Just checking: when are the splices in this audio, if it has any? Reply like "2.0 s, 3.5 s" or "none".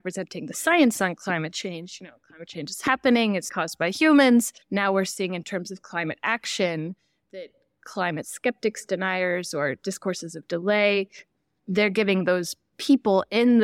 3.5 s, 4.6 s